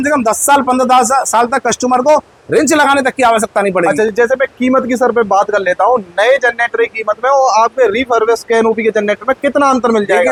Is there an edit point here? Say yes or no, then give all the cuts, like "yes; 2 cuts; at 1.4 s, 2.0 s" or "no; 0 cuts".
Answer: no; 0 cuts